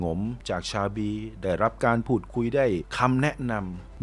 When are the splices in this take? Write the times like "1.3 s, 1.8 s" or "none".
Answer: none